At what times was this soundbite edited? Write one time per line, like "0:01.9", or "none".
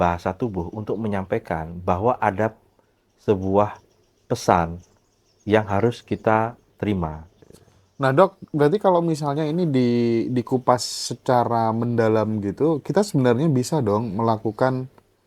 0:07.3